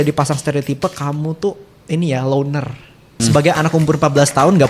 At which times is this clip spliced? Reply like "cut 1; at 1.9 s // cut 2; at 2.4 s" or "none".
cut 1; at 3.2 s